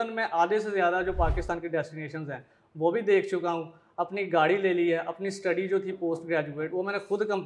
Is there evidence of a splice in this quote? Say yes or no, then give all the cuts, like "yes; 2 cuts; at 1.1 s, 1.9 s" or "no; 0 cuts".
no; 0 cuts